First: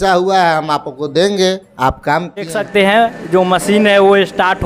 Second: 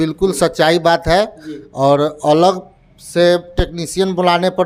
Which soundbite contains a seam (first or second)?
first